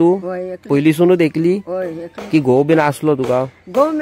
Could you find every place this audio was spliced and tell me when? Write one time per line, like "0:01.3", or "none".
none